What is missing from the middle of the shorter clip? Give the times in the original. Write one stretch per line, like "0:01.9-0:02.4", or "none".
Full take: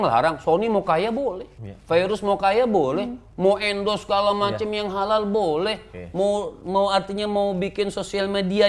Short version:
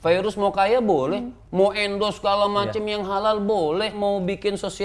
0:05.8-0:07.3